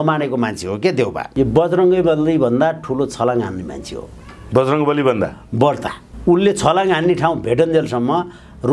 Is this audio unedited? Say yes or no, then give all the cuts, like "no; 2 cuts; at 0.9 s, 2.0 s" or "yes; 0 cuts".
no; 1 cut; at 1.2 s